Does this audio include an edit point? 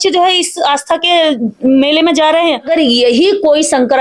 yes; 1 cut; at 2.7 s

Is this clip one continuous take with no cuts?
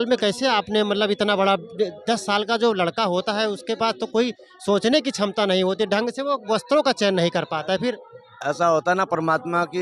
yes; 0 cuts

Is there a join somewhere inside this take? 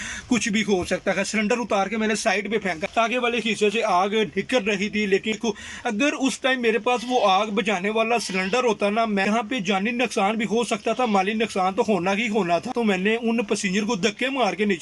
yes; 4 cuts; at 2.8 s, 5.3 s, 9.3 s, 12.7 s

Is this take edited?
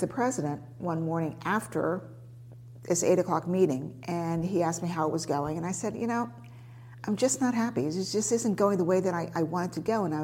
no; 0 cuts

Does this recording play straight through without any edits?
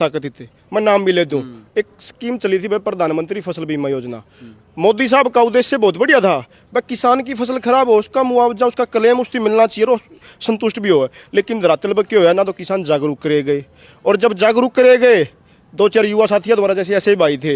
yes; 0 cuts

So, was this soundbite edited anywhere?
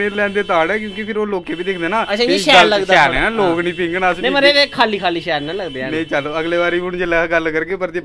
no; 0 cuts

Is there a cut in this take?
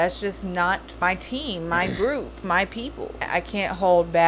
yes; 2 cuts; at 0.9 s, 3.3 s

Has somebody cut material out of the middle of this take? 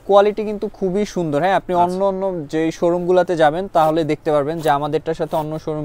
no; 0 cuts

